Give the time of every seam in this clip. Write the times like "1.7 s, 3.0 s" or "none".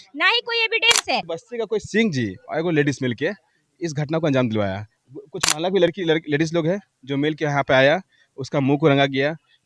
1.3 s